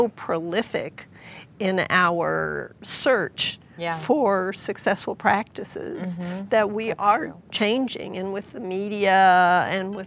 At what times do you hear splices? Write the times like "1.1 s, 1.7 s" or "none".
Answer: 2.8 s